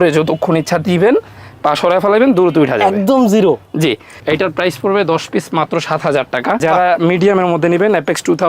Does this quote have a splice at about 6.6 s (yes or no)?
yes